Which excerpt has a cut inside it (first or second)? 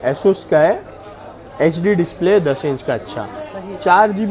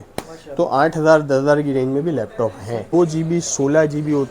second